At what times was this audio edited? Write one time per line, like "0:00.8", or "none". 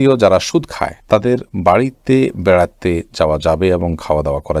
none